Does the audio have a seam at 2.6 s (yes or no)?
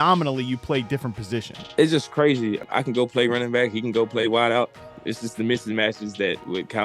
yes